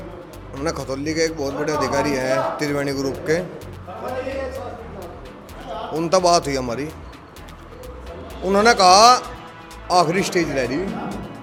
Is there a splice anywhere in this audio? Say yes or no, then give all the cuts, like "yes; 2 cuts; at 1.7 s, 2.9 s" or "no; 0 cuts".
no; 0 cuts